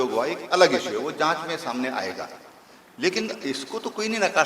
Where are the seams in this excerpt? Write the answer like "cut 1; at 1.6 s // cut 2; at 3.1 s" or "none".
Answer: none

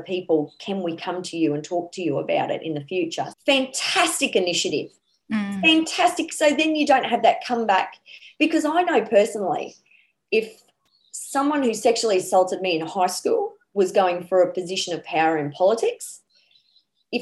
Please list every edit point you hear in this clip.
cut 1; at 3.3 s

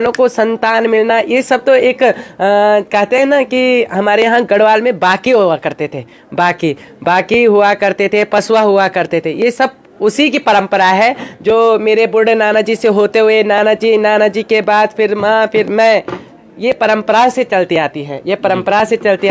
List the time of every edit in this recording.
none

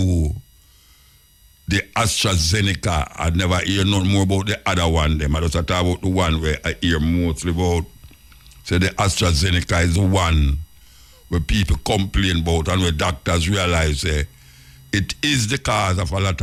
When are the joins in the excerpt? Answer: none

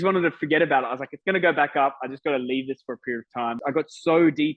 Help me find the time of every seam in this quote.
cut 1; at 3.6 s

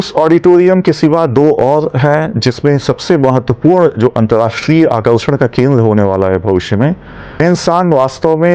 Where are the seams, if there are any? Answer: cut 1; at 7.4 s

